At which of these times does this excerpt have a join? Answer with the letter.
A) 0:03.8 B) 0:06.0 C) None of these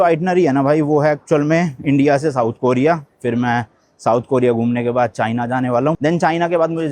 B